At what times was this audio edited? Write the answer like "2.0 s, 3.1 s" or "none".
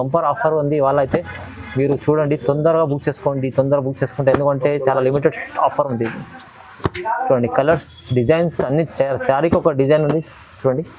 none